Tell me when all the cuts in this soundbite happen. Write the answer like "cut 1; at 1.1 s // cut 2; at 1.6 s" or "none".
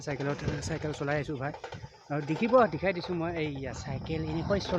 none